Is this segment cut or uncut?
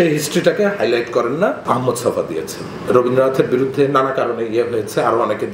cut